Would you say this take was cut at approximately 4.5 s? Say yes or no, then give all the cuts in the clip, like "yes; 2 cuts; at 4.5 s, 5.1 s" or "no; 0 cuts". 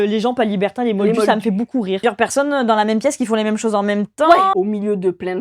yes; 2 cuts; at 2.0 s, 4.5 s